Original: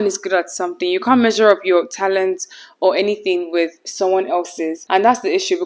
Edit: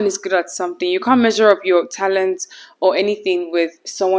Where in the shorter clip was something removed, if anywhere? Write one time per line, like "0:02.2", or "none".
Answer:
none